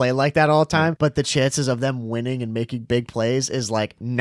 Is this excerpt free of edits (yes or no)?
no